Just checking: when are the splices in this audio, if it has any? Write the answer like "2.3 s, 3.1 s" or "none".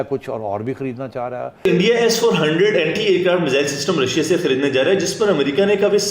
1.7 s